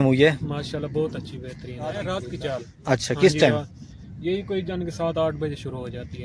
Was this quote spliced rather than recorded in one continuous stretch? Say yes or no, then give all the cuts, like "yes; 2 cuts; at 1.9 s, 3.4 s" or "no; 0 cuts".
yes; 1 cut; at 2.0 s